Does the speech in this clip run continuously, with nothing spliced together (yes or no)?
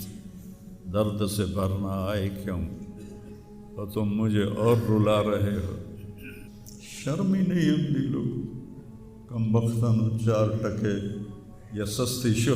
no